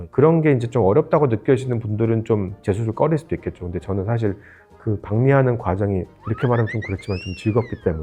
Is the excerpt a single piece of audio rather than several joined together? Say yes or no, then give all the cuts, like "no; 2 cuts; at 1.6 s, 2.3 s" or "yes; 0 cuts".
yes; 0 cuts